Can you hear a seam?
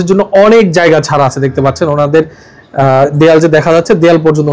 no; 0 cuts

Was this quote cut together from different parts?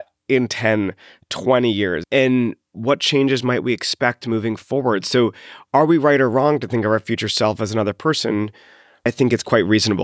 yes; 2 cuts; at 2.0 s, 9.1 s

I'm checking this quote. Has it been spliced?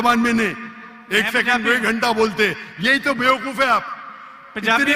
no; 0 cuts

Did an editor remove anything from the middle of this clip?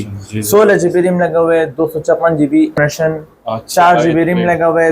yes; 1 cut; at 2.7 s

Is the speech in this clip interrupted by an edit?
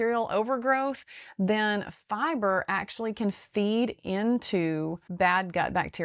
yes; 1 cut; at 5.0 s

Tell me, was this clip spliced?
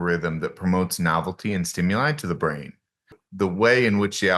yes; 1 cut; at 3.2 s

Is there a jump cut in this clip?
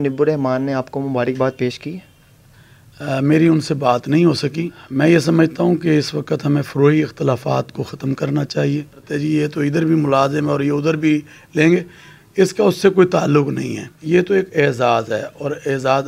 yes; 3 cuts; at 4.8 s, 9.0 s, 13.9 s

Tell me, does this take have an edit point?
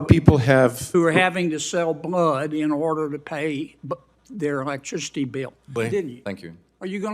yes; 1 cut; at 5.7 s

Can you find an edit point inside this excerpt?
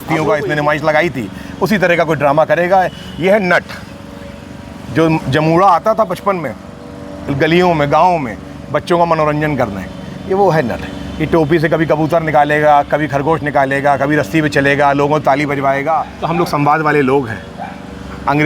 yes; 1 cut; at 16.0 s

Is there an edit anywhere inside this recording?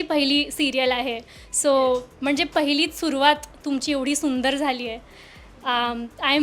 no; 0 cuts

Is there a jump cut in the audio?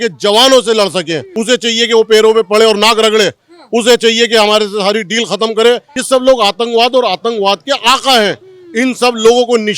yes; 2 cuts; at 1.3 s, 5.9 s

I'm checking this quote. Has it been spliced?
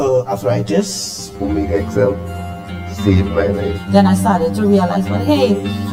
no; 0 cuts

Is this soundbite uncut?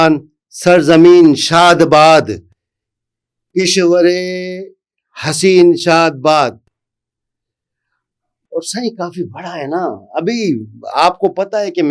yes; 0 cuts

